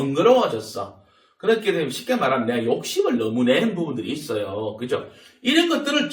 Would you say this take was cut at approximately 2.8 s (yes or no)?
no